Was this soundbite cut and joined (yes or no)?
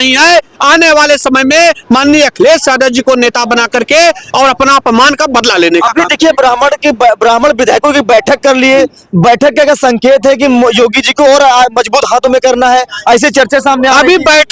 no